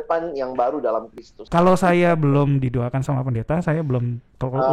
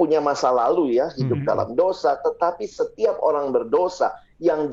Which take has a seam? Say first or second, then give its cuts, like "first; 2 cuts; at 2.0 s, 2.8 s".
first; 1 cut; at 1.4 s